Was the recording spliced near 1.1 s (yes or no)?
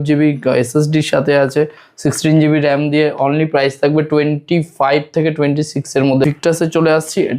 no